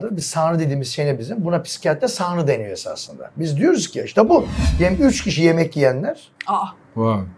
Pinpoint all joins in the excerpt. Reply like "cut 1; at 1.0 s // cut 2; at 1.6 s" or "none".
cut 1; at 4.6 s